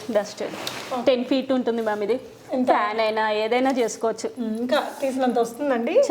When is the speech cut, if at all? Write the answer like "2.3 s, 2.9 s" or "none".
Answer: none